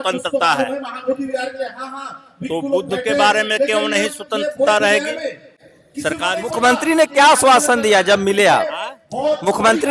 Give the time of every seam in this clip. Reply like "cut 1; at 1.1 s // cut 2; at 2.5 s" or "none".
none